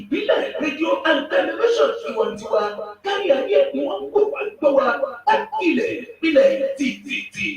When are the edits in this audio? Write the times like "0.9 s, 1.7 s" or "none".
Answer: none